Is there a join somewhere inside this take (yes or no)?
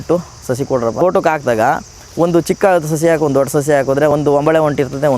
yes